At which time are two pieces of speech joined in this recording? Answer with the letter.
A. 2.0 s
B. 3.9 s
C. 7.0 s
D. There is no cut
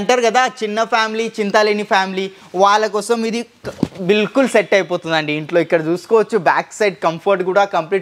D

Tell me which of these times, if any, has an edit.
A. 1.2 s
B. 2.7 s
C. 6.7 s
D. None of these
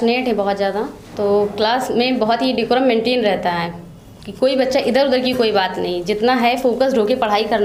D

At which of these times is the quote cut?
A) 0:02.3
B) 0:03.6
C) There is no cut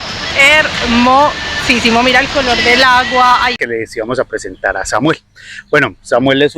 B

